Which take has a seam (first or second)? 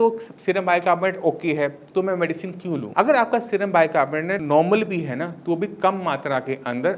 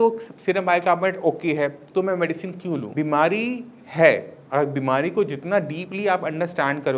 second